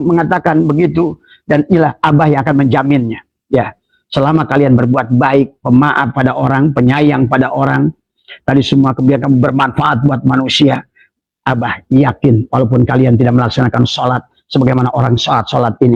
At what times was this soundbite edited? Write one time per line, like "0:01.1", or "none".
none